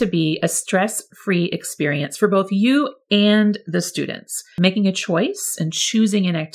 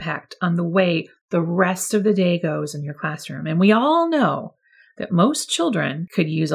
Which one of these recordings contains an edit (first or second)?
first